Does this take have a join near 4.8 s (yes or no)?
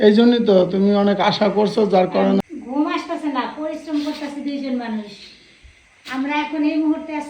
no